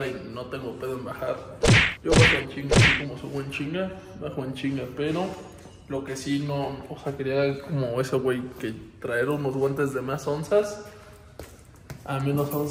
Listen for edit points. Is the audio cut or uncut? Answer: uncut